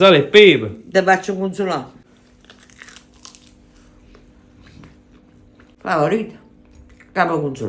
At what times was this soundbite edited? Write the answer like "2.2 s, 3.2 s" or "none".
5.8 s